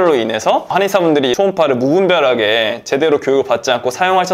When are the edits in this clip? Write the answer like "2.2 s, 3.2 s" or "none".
1.1 s